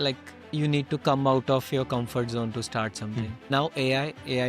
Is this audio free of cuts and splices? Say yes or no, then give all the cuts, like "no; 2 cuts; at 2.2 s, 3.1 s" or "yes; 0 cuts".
no; 1 cut; at 3.4 s